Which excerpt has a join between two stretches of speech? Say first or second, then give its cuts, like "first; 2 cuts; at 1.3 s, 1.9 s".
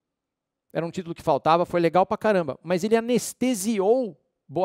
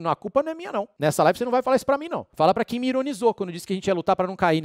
second; 2 cuts; at 0.9 s, 2.2 s